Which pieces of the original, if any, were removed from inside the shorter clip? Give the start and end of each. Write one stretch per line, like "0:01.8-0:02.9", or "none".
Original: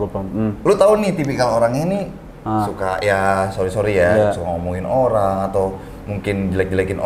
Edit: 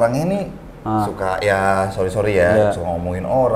none